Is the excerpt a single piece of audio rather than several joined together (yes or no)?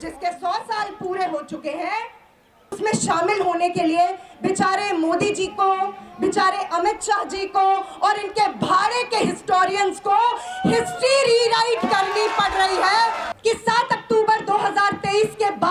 no